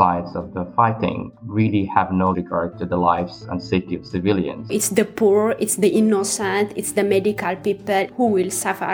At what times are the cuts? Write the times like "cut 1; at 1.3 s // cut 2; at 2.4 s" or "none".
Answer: cut 1; at 1.3 s // cut 2; at 4.7 s // cut 3; at 8.1 s